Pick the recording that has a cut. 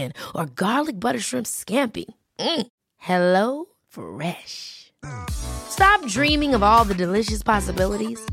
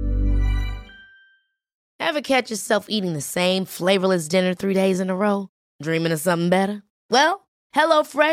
second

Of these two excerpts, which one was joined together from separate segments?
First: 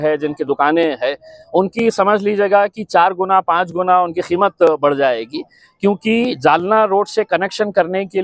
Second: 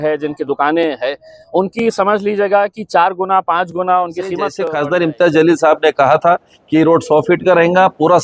second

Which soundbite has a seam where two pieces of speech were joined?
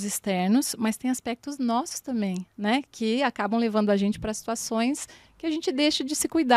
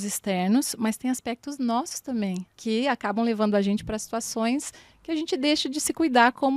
second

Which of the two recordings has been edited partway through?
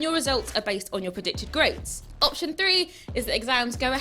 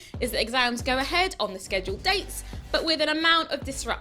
first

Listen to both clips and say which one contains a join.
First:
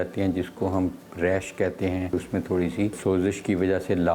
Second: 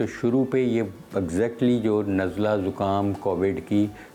first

